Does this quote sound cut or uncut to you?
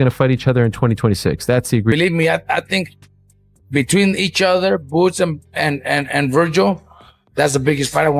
cut